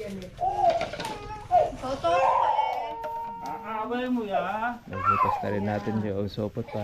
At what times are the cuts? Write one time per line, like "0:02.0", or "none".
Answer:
none